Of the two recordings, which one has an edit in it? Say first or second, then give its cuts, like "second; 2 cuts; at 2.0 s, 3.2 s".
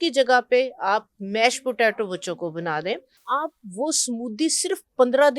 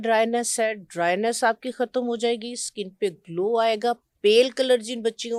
first; 1 cut; at 3.1 s